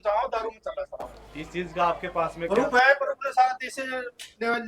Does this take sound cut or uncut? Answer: uncut